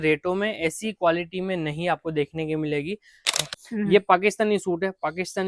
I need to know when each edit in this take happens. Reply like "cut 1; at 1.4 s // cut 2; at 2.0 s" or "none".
cut 1; at 3.3 s